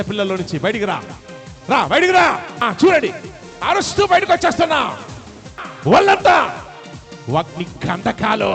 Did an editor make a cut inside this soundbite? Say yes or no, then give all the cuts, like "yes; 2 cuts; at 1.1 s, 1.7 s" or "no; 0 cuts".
yes; 2 cuts; at 2.6 s, 5.7 s